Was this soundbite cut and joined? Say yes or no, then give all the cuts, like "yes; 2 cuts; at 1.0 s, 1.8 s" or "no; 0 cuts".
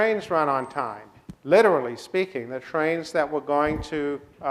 yes; 1 cut; at 1.8 s